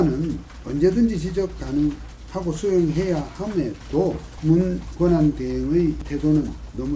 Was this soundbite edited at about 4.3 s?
yes; 2 cuts; at 4.3 s, 6.0 s

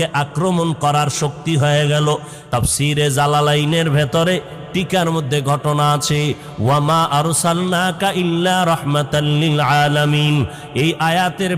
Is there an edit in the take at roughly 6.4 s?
no; 1 cut; at 2.4 s

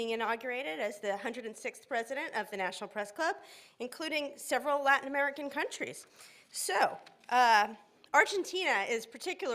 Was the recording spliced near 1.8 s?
yes; 1 cut; at 1.8 s

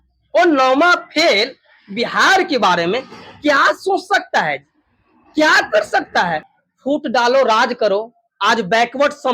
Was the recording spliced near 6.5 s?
yes; 1 cut; at 6.5 s

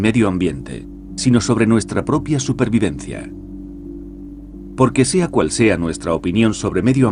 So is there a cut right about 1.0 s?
no; 1 cut; at 4.6 s

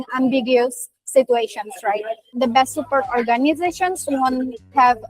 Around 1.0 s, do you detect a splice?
no; 1 cut; at 2.3 s

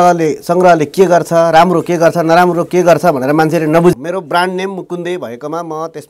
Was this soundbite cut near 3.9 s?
yes; 1 cut; at 3.9 s

